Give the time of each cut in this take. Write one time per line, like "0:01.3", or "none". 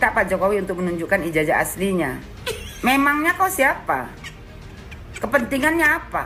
none